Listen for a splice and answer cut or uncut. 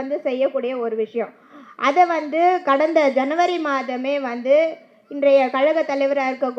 uncut